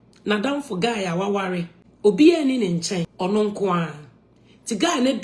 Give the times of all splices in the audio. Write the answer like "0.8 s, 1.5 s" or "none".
1.8 s, 3.1 s